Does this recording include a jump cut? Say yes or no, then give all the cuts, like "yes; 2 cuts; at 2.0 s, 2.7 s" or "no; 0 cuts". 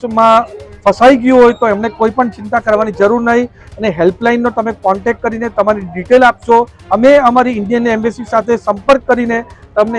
yes; 2 cuts; at 3.6 s, 6.8 s